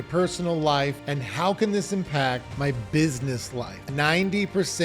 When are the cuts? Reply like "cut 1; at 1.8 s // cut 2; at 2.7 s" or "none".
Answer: cut 1; at 1.0 s // cut 2; at 2.5 s // cut 3; at 3.8 s